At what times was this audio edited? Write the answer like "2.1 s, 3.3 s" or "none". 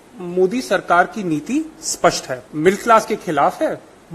2.4 s